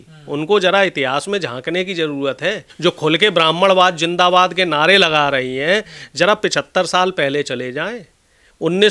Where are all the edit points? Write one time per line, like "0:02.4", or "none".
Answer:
0:02.7